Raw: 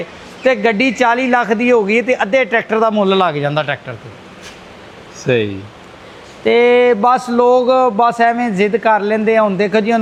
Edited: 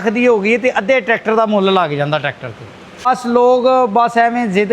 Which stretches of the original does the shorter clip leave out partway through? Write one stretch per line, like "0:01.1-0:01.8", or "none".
0:04.5-0:07.1